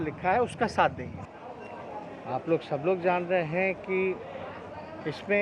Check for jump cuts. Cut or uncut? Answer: cut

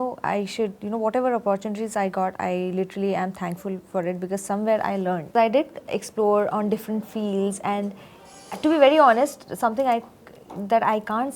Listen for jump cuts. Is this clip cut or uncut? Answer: cut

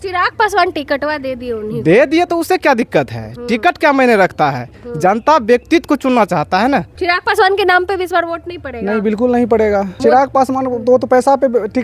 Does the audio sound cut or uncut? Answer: cut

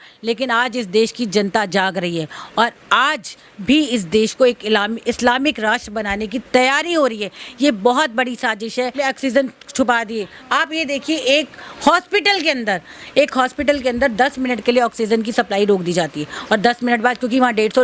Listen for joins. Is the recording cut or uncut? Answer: cut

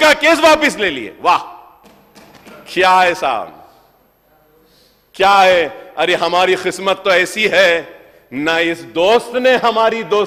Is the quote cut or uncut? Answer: uncut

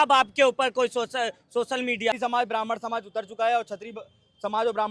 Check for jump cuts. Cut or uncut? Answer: cut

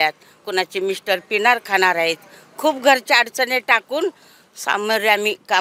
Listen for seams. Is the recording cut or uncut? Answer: uncut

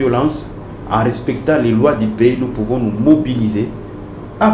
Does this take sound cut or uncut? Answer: uncut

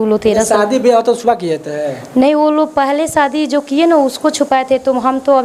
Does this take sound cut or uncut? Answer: uncut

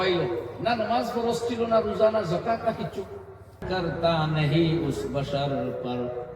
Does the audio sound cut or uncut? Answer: cut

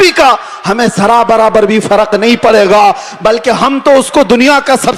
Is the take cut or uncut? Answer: uncut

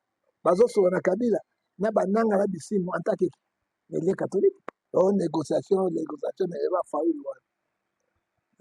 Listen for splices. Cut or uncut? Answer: cut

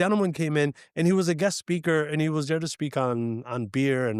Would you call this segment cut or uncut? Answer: uncut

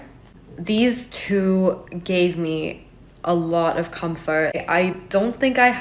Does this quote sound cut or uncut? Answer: cut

